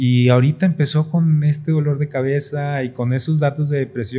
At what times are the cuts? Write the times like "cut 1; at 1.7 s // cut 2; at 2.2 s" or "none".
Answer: none